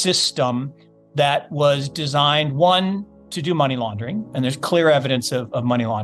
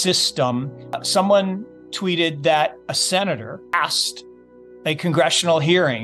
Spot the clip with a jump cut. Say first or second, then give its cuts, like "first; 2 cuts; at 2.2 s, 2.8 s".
second; 2 cuts; at 1.0 s, 3.7 s